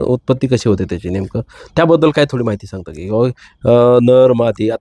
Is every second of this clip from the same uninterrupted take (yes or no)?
yes